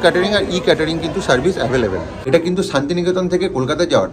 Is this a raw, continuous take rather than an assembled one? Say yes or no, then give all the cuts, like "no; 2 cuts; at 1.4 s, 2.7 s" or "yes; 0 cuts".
no; 1 cut; at 2.1 s